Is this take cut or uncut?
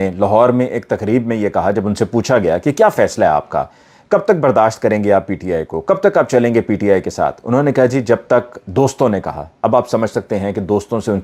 uncut